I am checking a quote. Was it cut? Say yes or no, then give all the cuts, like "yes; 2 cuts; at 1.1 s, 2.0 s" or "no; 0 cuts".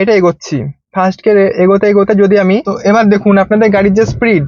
yes; 1 cut; at 2.7 s